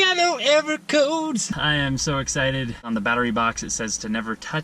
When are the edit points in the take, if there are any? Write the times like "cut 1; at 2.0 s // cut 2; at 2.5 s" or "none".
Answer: cut 1; at 1.6 s // cut 2; at 2.8 s